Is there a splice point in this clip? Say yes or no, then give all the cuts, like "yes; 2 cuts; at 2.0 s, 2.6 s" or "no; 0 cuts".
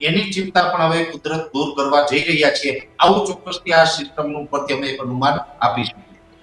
no; 0 cuts